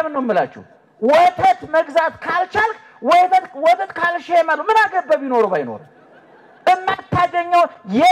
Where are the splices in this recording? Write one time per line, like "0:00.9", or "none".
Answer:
none